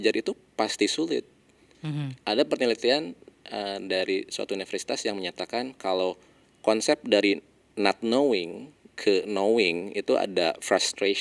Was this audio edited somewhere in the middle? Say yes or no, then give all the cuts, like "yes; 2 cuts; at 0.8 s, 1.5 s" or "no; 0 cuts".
no; 0 cuts